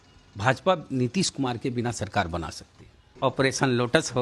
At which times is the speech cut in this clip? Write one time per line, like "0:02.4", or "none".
0:03.2